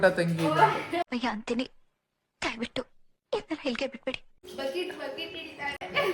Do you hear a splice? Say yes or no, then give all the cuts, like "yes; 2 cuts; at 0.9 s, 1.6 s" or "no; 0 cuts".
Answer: yes; 2 cuts; at 0.7 s, 4.4 s